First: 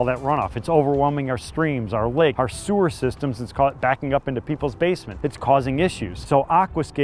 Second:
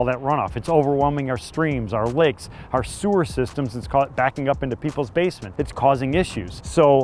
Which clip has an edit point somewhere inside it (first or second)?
first